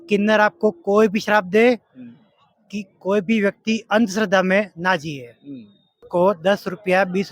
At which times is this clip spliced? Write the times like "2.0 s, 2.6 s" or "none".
5.9 s